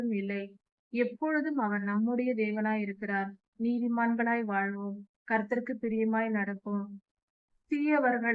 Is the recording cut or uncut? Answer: cut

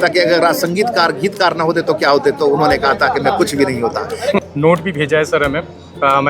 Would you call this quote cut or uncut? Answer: cut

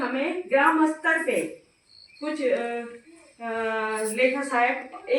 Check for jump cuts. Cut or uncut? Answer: uncut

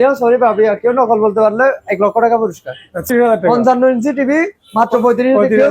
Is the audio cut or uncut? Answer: cut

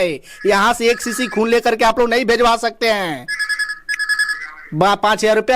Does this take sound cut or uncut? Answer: uncut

